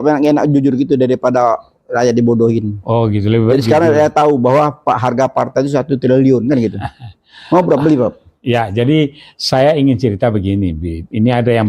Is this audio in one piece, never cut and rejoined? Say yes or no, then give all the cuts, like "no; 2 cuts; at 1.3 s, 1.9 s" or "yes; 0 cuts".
yes; 0 cuts